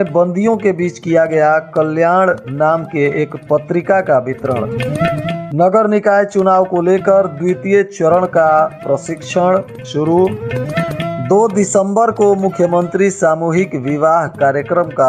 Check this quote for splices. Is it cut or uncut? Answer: uncut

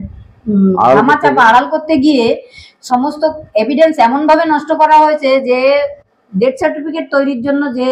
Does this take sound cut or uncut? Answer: uncut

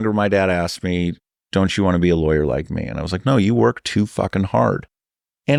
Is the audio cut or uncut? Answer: uncut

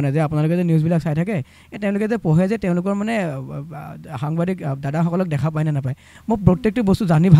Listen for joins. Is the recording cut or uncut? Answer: uncut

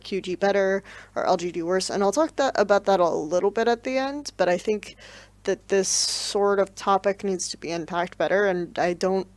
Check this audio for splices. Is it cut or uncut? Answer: cut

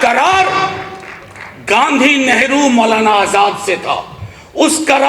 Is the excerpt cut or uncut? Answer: uncut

